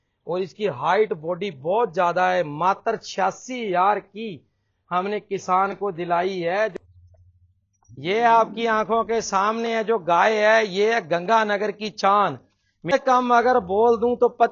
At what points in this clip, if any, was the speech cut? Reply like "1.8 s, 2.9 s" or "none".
6.7 s, 12.9 s